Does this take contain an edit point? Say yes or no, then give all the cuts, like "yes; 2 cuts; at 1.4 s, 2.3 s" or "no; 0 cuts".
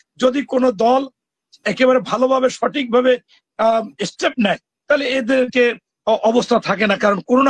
no; 0 cuts